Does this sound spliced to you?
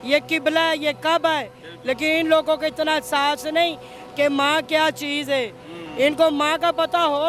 no; 0 cuts

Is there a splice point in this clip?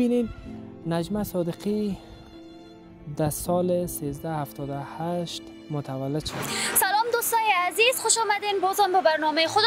yes; 1 cut; at 6.7 s

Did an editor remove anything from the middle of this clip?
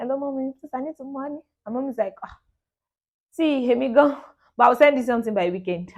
no; 0 cuts

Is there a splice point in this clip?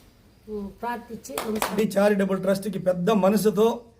yes; 1 cut; at 1.7 s

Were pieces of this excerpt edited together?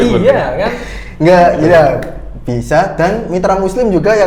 no; 0 cuts

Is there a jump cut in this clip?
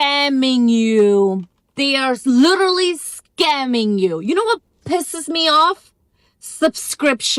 no; 0 cuts

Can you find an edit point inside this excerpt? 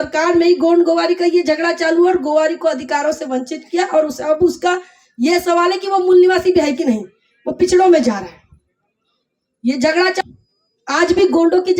yes; 1 cut; at 10.2 s

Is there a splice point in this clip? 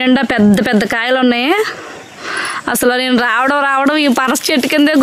no; 0 cuts

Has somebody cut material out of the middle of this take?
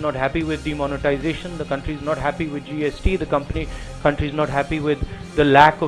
no; 0 cuts

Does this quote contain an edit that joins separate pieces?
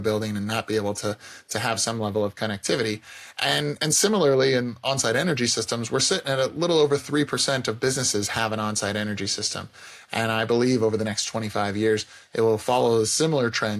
no; 0 cuts

